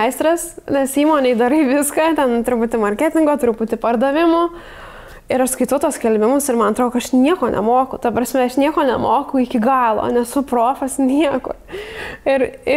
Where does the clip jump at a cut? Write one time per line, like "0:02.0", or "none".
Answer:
none